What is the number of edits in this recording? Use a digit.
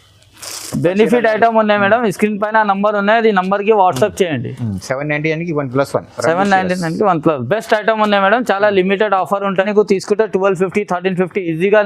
1